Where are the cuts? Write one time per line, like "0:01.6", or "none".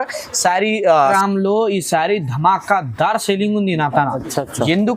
0:01.1